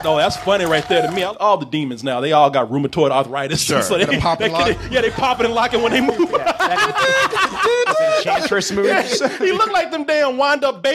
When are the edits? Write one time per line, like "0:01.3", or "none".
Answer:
0:01.3